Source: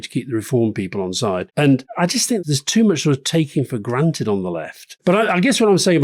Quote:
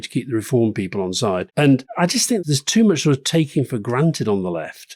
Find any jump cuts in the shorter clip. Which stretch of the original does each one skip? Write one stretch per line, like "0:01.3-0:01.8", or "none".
none

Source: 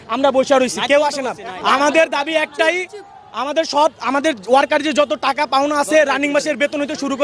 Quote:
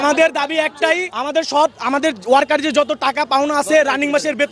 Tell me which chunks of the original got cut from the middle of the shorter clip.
0:02.9-0:03.3

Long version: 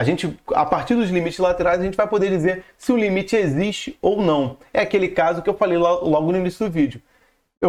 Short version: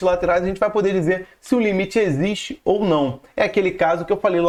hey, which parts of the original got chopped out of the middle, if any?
none

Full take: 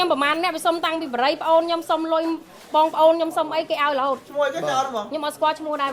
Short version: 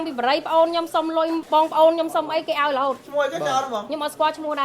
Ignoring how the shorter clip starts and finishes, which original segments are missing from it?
0:02.4-0:02.6

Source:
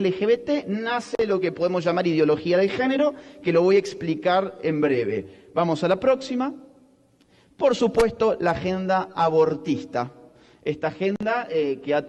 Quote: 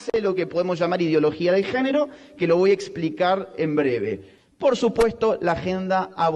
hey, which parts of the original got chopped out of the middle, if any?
0:05.3-0:07.3

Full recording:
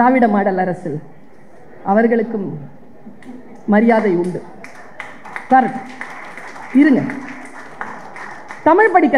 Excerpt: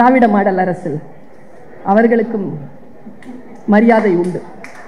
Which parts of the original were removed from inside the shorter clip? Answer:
none

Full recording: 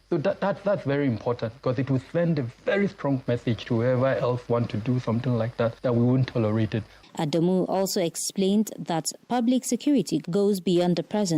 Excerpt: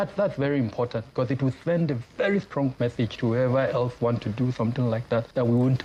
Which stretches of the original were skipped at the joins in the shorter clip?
none

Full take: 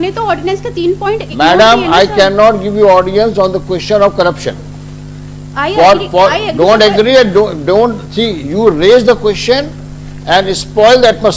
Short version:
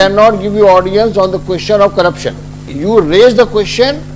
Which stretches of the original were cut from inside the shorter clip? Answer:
0:04.9-0:08.4

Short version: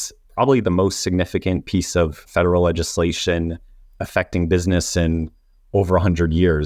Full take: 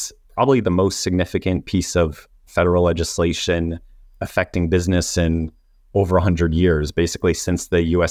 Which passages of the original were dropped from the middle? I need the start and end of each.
0:02.2-0:02.4

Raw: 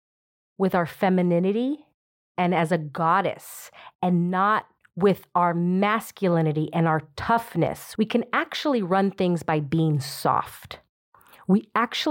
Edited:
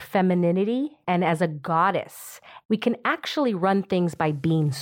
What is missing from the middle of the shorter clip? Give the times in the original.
0:01.8-0:02.3
0:03.8-0:07.8

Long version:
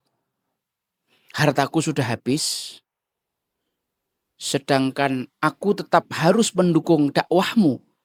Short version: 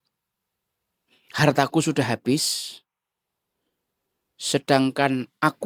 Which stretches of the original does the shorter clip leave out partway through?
none

